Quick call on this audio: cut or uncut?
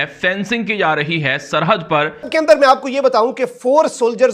cut